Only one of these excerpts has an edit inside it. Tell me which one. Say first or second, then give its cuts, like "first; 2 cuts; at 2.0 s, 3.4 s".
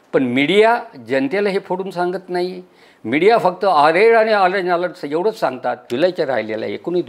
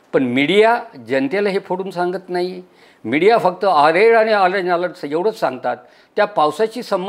first; 1 cut; at 5.9 s